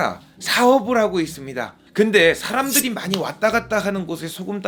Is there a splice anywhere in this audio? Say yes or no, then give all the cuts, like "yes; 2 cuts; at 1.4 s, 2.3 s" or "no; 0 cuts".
no; 0 cuts